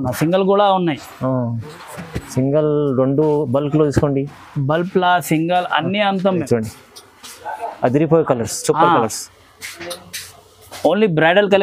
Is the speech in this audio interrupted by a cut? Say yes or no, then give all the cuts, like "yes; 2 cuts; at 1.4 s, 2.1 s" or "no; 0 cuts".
yes; 1 cut; at 6.4 s